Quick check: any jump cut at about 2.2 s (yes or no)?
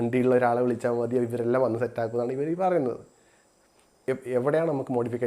no